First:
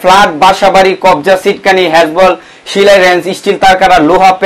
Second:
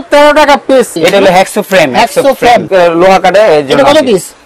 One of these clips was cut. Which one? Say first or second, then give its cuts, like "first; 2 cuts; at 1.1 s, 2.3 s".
second; 2 cuts; at 0.9 s, 2.7 s